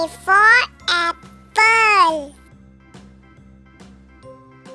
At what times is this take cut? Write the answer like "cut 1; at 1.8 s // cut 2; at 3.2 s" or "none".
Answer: none